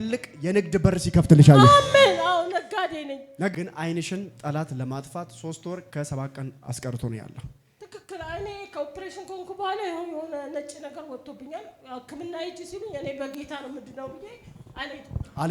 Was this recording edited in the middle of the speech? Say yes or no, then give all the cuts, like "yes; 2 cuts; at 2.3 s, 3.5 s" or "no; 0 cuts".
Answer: yes; 1 cut; at 3.5 s